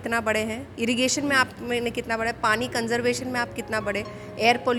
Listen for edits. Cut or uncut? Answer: uncut